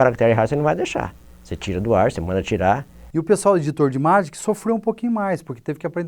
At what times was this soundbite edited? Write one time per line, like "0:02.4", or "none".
0:03.0